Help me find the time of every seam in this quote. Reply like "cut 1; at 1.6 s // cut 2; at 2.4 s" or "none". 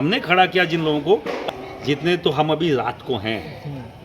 cut 1; at 1.4 s